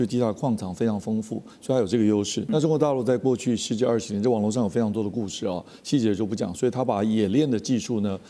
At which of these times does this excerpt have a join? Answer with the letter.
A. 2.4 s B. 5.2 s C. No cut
A